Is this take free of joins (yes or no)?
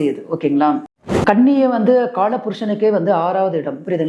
no